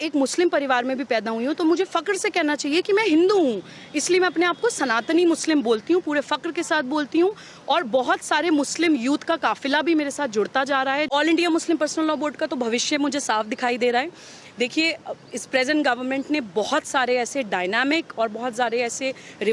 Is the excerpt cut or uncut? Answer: cut